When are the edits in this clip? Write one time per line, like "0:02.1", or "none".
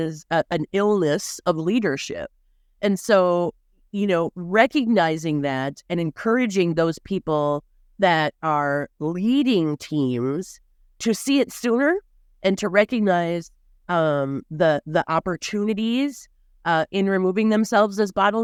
none